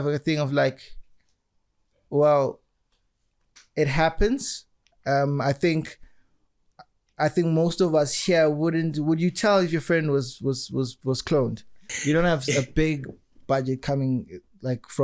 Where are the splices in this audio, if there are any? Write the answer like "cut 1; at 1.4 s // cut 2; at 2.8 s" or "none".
cut 1; at 11.9 s